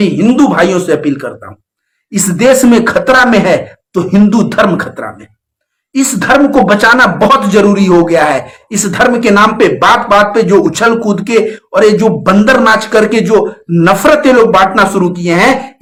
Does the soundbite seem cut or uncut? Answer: uncut